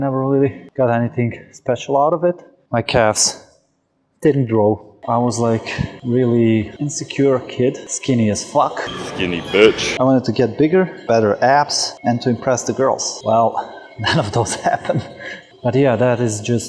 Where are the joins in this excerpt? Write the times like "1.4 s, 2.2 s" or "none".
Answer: 4.9 s, 15.5 s